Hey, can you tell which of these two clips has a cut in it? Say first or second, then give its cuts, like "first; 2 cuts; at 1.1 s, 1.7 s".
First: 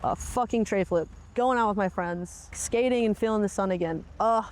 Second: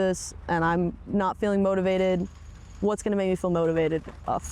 first; 2 cuts; at 1.3 s, 2.5 s